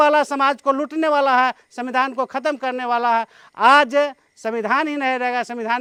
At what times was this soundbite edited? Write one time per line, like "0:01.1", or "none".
none